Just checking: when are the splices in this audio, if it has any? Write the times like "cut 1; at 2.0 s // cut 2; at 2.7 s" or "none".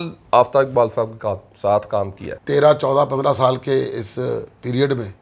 cut 1; at 2.2 s